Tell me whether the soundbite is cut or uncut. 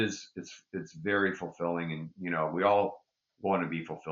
uncut